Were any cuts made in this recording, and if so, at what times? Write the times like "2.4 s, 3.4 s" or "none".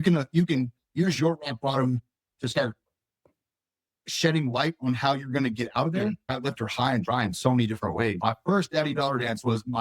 6.3 s, 8.1 s